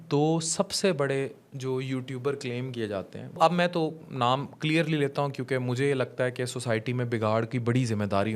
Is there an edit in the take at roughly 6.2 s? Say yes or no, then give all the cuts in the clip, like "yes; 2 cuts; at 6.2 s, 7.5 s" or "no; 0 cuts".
no; 1 cut; at 3.4 s